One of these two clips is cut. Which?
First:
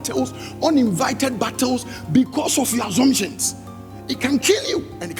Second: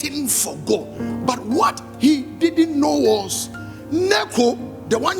second; 1 cut; at 0.9 s

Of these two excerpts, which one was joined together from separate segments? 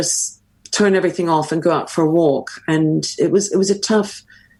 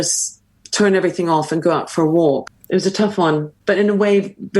second; 2 cuts; at 2.5 s, 3.5 s

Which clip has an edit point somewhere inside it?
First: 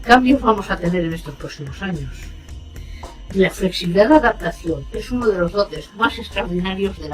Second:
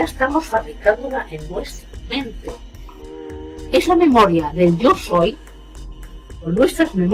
first; 1 cut; at 3.4 s

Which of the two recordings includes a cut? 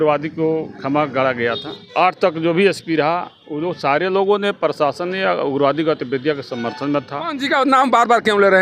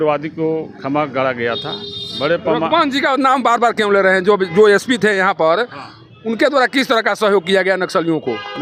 first; 2 cuts; at 1.8 s, 7.4 s

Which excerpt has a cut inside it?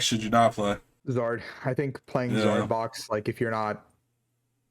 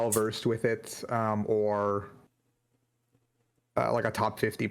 first; 1 cut; at 0.9 s

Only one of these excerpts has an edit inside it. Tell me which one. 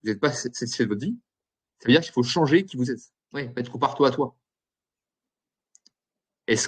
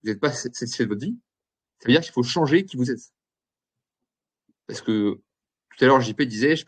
first; 1 cut; at 3.5 s

